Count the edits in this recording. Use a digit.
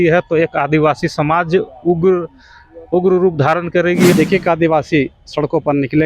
1